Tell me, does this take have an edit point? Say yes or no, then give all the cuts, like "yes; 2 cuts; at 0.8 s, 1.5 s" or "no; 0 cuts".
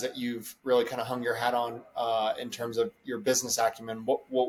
no; 0 cuts